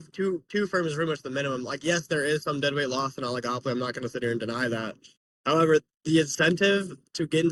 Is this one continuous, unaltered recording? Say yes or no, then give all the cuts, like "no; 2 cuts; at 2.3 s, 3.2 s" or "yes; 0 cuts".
yes; 0 cuts